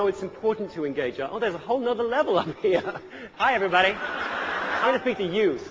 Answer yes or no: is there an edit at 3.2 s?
yes